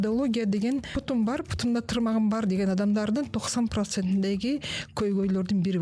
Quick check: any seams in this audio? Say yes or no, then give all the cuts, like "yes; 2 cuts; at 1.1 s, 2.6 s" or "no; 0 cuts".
yes; 1 cut; at 0.9 s